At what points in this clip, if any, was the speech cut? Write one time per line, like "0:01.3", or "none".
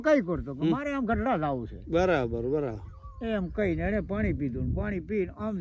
none